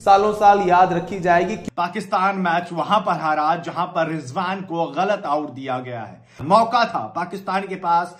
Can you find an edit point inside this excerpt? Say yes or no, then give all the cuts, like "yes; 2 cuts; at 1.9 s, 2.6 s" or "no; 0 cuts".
yes; 2 cuts; at 1.6 s, 6.4 s